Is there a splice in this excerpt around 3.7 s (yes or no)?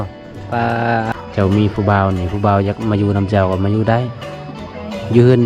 no